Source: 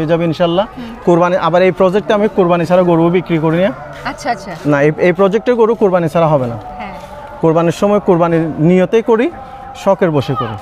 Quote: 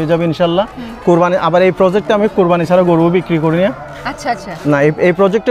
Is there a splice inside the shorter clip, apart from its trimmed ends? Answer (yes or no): no